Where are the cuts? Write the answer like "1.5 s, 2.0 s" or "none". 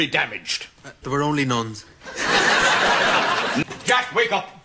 3.6 s